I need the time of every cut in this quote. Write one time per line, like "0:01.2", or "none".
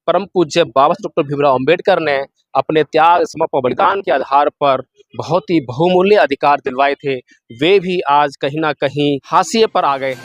0:09.2